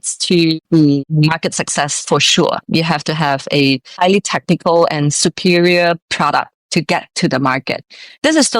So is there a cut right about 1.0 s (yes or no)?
yes